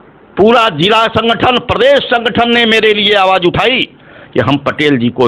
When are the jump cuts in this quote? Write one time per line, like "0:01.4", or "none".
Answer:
none